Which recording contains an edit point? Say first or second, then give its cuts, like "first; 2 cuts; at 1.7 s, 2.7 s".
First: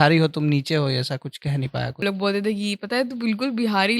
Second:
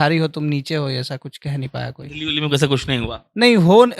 first; 1 cut; at 2.0 s